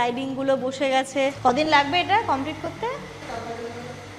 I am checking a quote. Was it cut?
yes; 2 cuts; at 1.4 s, 3.2 s

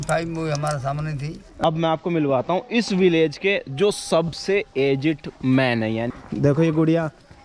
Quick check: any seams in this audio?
yes; 2 cuts; at 1.5 s, 6.1 s

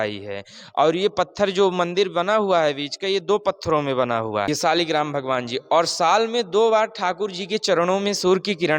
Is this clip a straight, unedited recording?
no; 1 cut; at 4.5 s

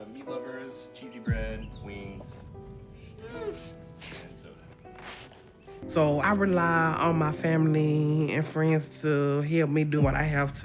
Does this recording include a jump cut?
yes; 1 cut; at 5.9 s

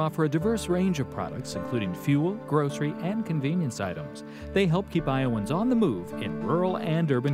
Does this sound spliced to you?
no; 0 cuts

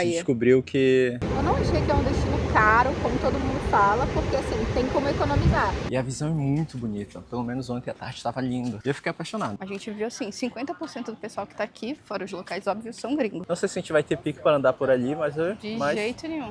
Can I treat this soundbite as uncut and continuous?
no; 4 cuts; at 1.2 s, 5.8 s, 9.6 s, 13.4 s

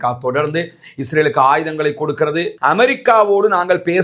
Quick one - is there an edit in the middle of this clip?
yes; 1 cut; at 2.5 s

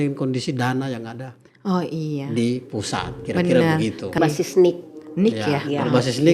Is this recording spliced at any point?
yes; 1 cut; at 4.2 s

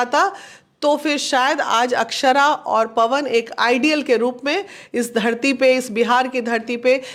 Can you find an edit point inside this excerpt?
no; 0 cuts

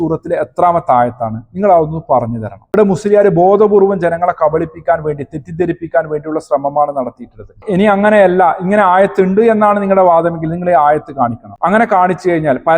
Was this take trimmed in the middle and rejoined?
yes; 1 cut; at 7.6 s

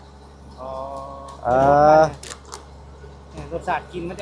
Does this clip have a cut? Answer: no; 0 cuts

